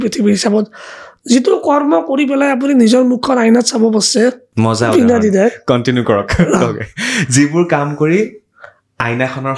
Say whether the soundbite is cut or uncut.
cut